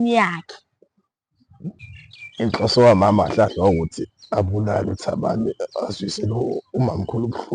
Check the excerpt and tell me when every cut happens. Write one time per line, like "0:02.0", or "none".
0:01.8